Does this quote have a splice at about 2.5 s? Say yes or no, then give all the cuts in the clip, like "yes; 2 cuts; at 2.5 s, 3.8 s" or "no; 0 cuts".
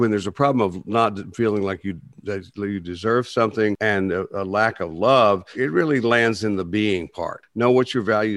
no; 3 cuts; at 3.8 s, 5.5 s, 7.4 s